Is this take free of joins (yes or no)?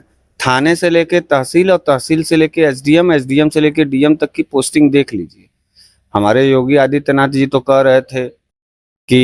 yes